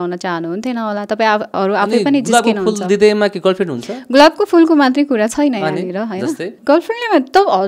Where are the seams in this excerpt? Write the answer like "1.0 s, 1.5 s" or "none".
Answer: 6.5 s

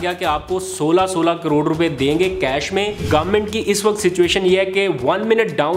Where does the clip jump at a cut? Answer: 3.0 s

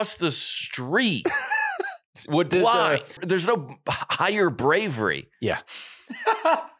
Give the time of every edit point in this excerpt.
3.1 s

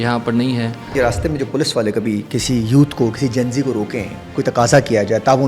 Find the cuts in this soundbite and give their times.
0.9 s, 4.4 s

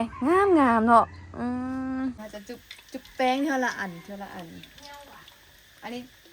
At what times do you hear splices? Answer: 2.3 s

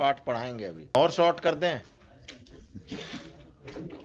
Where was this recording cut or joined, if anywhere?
0.9 s

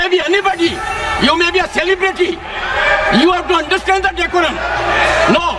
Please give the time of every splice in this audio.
none

